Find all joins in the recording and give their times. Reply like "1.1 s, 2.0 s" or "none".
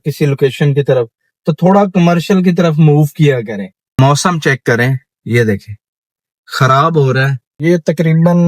7.4 s